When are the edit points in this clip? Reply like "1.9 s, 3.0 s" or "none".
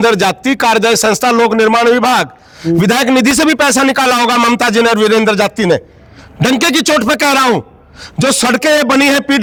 none